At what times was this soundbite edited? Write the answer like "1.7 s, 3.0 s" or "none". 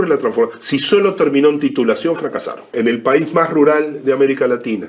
2.7 s